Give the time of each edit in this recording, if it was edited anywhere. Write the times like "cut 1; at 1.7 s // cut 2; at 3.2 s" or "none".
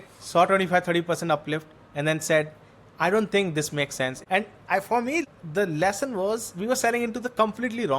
cut 1; at 4.2 s // cut 2; at 5.2 s